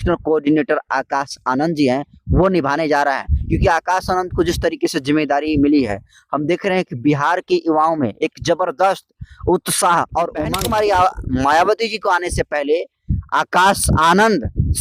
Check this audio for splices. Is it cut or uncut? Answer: cut